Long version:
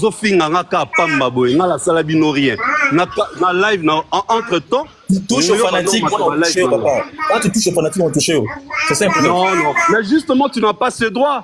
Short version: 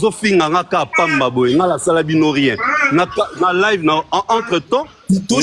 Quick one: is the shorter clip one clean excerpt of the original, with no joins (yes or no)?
yes